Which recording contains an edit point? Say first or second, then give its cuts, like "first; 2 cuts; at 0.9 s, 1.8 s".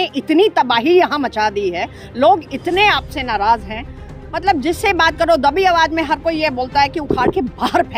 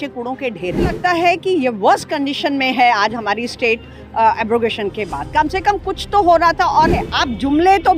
second; 2 cuts; at 1.0 s, 7.1 s